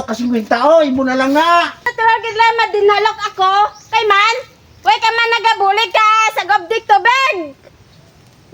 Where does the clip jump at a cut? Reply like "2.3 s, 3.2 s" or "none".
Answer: 1.8 s